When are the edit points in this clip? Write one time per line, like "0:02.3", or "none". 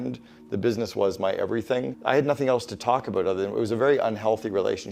0:01.9